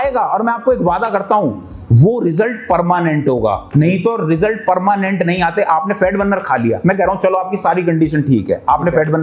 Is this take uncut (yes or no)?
yes